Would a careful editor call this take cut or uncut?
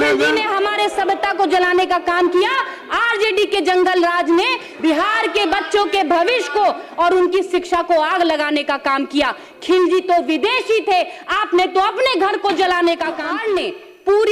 cut